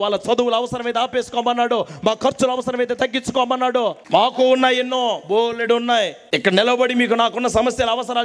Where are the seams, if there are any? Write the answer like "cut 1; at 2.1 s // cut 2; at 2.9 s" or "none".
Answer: cut 1; at 4.0 s // cut 2; at 6.2 s